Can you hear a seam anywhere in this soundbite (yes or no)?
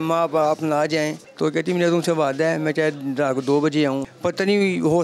yes